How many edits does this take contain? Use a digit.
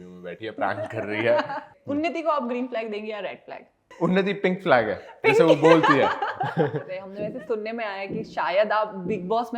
3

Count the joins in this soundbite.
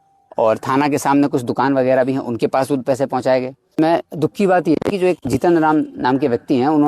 1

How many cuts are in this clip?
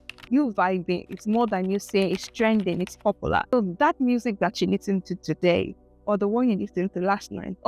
1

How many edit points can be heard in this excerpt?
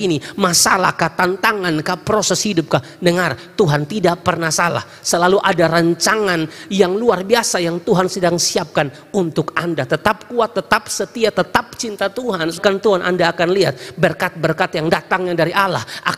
1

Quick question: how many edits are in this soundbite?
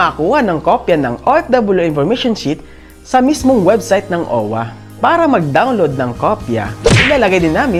0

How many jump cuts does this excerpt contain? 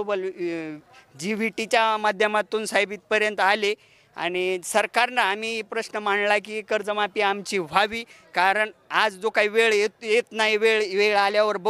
0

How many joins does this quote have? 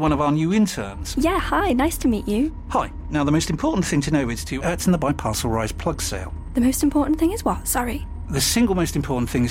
0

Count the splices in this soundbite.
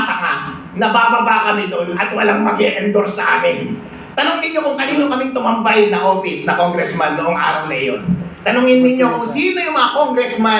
0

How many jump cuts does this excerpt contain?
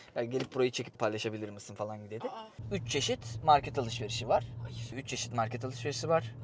1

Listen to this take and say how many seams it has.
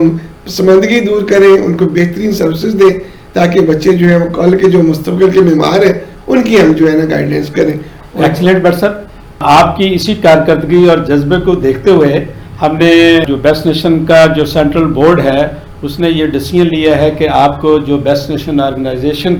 0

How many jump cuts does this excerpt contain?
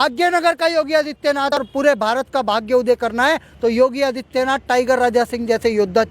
1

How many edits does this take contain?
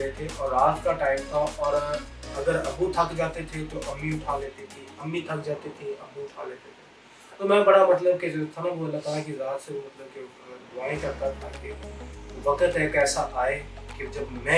0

